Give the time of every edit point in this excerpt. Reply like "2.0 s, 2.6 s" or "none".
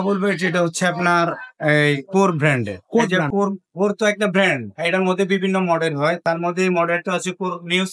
3.2 s